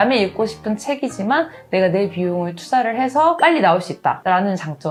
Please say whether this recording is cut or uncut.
uncut